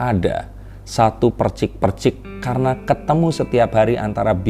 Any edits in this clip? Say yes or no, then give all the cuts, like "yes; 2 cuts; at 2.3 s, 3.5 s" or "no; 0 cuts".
no; 0 cuts